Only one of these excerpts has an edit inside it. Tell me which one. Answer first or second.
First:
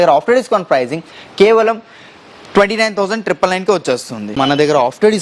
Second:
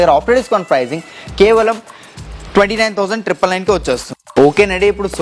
first